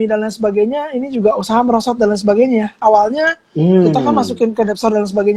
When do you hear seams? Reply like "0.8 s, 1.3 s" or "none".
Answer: none